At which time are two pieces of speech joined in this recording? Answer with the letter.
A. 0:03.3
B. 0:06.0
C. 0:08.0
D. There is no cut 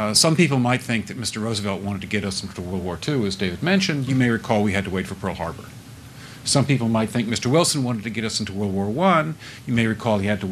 A